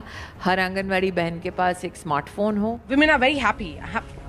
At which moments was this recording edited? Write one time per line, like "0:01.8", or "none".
0:02.8